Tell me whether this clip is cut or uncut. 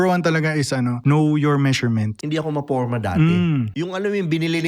cut